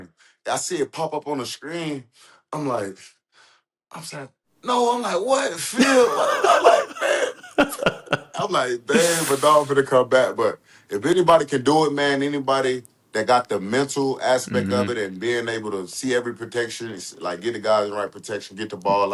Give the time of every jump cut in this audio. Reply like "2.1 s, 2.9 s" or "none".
none